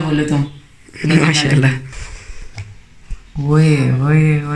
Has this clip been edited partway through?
yes; 1 cut; at 2.0 s

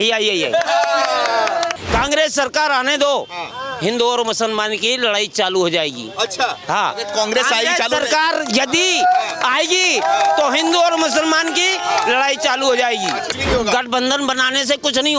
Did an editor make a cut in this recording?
yes; 2 cuts; at 1.8 s, 13.3 s

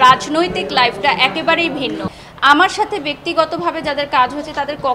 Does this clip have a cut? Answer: yes; 1 cut; at 2.2 s

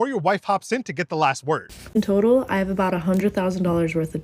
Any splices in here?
yes; 1 cut; at 1.7 s

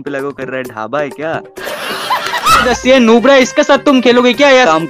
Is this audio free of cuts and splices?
no; 1 cut; at 2.5 s

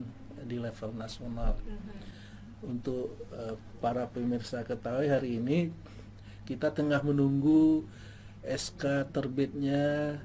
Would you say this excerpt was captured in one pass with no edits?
no; 1 cut; at 2.0 s

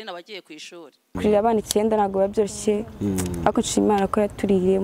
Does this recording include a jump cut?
yes; 1 cut; at 1.2 s

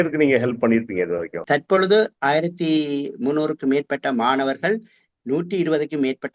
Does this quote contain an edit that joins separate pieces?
yes; 1 cut; at 1.4 s

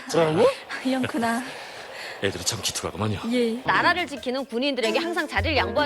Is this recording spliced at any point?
yes; 1 cut; at 3.6 s

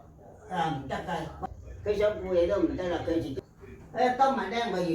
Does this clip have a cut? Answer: yes; 1 cut; at 3.3 s

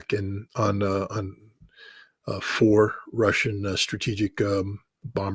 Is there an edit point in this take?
no; 0 cuts

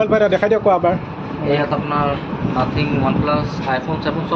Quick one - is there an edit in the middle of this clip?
no; 0 cuts

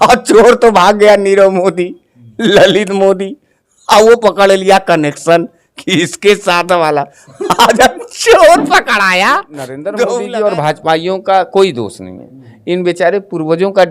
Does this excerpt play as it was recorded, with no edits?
no; 1 cut; at 10.1 s

